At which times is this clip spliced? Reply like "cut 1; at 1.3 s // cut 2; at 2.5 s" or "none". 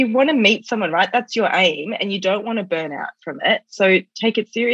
none